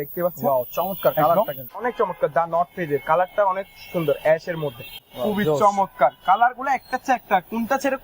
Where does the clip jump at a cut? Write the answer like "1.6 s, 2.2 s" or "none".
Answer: 1.6 s, 5.0 s